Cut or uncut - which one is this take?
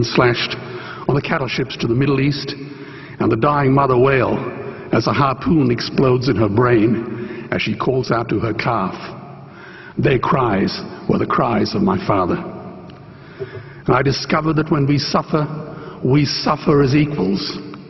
cut